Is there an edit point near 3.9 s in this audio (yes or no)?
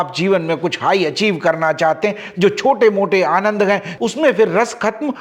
yes